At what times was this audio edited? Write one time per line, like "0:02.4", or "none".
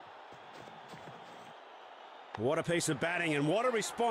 0:02.4